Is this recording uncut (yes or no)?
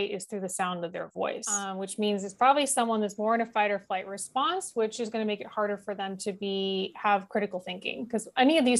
no